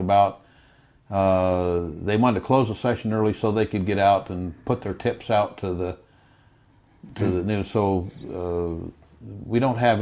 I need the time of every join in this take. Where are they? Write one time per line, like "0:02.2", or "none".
none